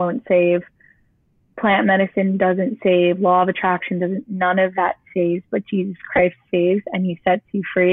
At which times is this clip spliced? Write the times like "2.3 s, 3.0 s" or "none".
none